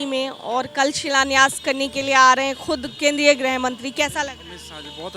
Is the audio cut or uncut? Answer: uncut